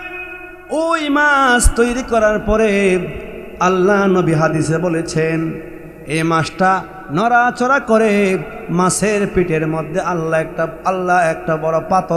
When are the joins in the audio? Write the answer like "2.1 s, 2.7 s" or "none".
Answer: none